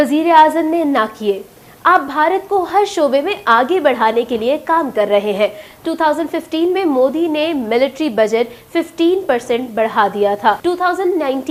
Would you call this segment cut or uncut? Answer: uncut